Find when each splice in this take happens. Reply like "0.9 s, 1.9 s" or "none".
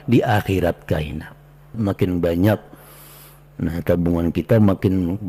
1.7 s